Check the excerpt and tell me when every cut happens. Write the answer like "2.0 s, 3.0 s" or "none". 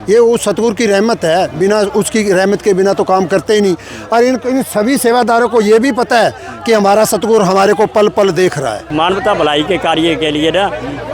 8.9 s